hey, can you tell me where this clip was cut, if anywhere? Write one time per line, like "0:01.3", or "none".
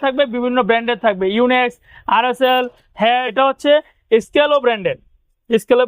0:03.3